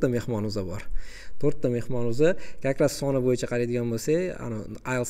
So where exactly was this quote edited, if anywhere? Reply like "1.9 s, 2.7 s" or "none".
none